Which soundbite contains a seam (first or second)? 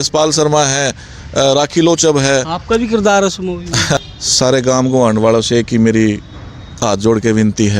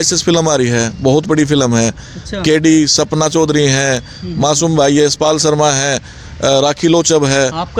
first